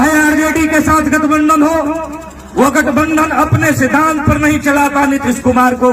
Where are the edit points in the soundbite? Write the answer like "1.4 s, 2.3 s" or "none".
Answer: none